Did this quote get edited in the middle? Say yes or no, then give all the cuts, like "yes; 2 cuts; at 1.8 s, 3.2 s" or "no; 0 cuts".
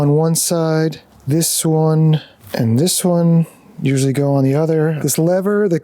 yes; 3 cuts; at 1.1 s, 2.4 s, 5.0 s